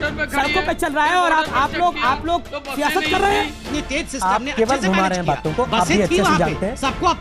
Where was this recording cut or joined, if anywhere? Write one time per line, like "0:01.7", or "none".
0:03.6